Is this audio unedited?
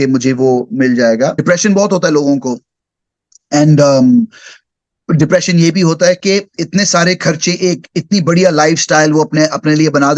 no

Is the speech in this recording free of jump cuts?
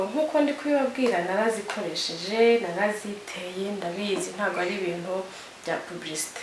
yes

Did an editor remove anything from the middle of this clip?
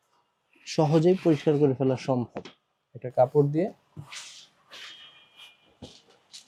no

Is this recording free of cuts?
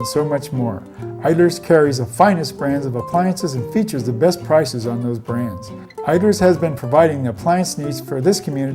yes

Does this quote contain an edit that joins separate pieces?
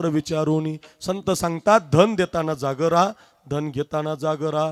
no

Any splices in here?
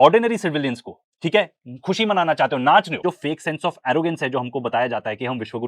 yes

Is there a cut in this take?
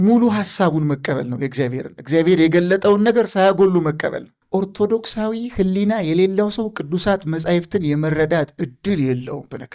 yes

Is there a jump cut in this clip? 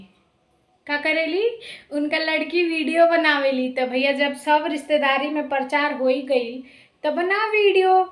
no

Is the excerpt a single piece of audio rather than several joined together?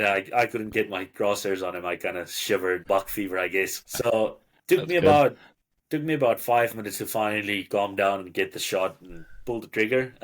no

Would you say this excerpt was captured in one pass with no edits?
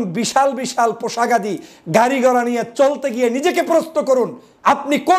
yes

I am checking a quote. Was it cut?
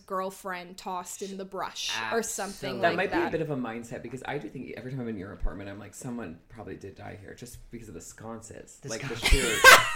no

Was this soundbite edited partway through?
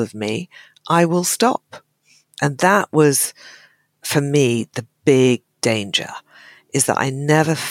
no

